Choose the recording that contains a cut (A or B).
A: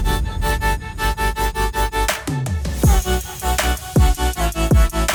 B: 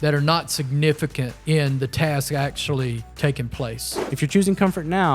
B